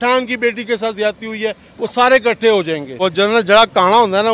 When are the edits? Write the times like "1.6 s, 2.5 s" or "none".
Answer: 3.0 s